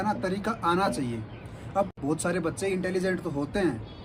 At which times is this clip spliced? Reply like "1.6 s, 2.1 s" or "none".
none